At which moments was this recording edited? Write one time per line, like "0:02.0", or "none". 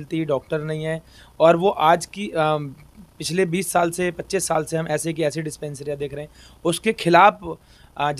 none